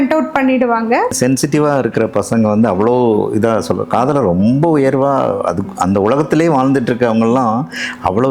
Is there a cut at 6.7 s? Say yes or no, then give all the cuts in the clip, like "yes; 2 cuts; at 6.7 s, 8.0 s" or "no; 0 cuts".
no; 1 cut; at 1.1 s